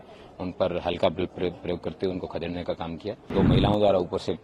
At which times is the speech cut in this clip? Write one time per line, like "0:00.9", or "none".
0:03.3

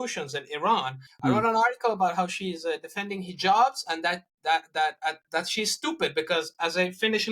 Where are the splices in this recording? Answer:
0:01.0

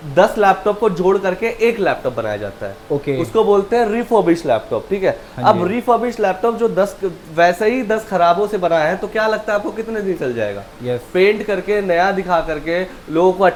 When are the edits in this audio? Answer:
none

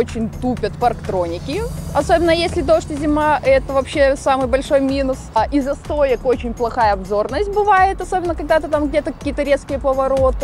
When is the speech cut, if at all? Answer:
0:05.4

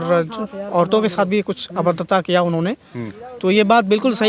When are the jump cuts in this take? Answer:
none

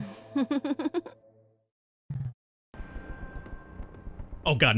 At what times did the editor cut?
0:02.8

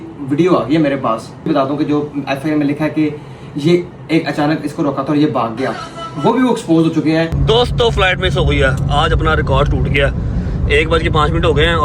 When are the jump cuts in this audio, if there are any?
0:01.5
0:07.4

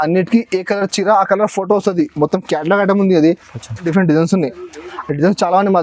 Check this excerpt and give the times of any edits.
0:03.8

